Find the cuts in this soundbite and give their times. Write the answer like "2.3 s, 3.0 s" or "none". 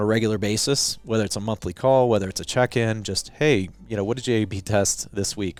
none